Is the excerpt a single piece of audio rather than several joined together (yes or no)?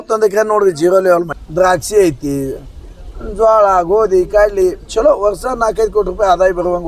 no